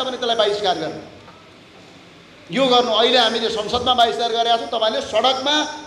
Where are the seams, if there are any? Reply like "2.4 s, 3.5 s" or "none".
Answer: none